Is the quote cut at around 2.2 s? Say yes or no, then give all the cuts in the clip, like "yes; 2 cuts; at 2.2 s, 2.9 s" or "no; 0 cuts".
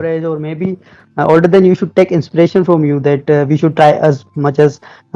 no; 0 cuts